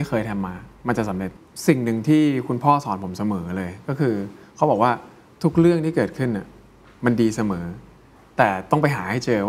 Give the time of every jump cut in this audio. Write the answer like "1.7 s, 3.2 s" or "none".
1.3 s

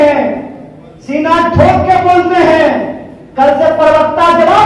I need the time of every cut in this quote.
none

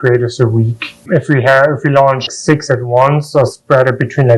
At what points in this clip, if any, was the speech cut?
2.3 s

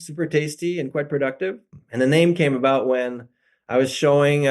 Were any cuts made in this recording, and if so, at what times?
1.7 s

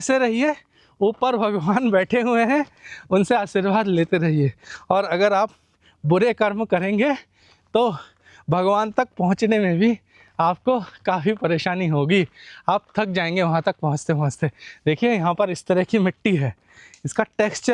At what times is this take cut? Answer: none

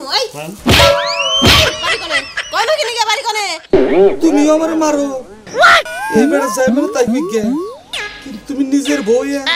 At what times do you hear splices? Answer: none

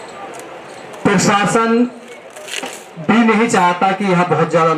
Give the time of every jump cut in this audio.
none

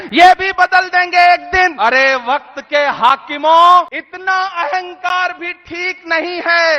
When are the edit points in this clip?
1.7 s, 4.0 s

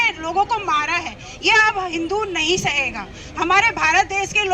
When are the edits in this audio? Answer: none

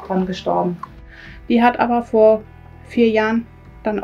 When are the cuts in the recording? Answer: 1.0 s

